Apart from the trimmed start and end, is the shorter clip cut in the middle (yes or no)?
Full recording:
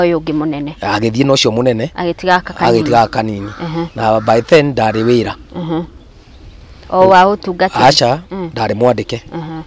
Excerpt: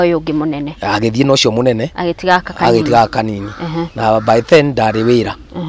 no